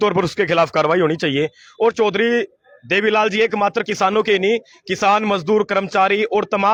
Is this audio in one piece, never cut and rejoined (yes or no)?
yes